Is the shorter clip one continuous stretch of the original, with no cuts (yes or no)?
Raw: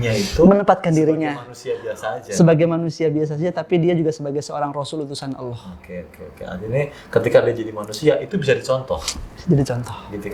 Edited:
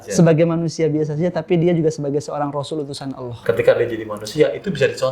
no